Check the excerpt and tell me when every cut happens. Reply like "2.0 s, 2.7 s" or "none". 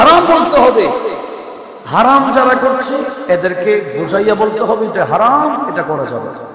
none